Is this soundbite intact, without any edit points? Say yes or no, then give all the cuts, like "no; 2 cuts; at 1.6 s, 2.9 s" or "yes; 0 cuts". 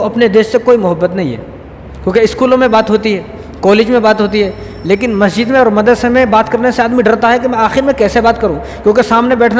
yes; 0 cuts